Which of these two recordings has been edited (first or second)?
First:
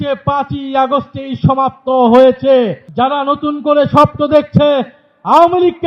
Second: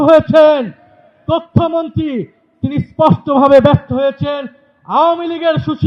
first